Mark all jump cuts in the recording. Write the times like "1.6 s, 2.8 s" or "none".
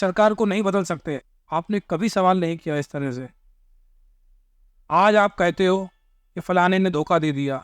1.1 s